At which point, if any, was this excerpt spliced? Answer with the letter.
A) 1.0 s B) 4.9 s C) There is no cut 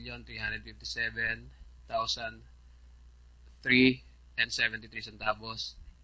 A